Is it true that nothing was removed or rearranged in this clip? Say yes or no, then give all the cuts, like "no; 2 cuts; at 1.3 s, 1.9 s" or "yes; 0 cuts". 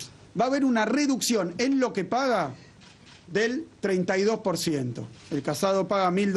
yes; 0 cuts